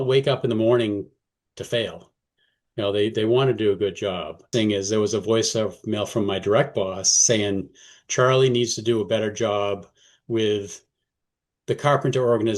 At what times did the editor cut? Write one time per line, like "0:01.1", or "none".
0:04.5